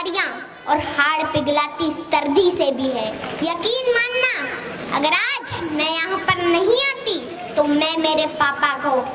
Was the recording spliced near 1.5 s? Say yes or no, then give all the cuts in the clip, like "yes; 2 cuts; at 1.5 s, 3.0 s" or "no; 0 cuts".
no; 1 cut; at 3.2 s